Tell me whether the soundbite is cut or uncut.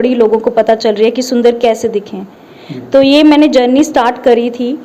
uncut